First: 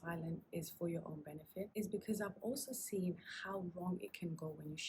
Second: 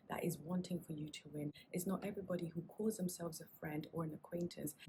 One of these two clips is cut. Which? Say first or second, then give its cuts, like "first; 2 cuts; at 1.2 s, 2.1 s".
first; 1 cut; at 1.7 s